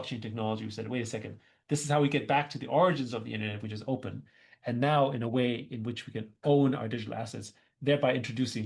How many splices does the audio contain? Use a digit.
0